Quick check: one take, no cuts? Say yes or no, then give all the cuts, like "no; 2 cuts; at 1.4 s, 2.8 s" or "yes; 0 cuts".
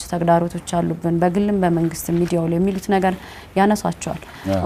yes; 0 cuts